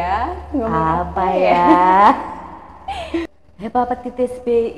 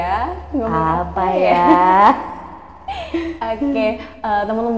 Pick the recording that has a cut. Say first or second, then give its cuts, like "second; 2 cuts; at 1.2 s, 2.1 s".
first; 1 cut; at 3.2 s